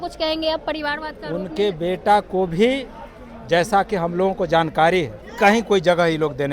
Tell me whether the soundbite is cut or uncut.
cut